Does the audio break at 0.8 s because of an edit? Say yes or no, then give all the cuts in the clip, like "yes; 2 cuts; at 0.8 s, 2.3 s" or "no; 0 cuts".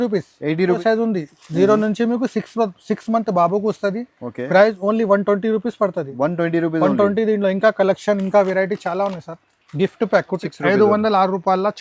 yes; 2 cuts; at 0.8 s, 10.4 s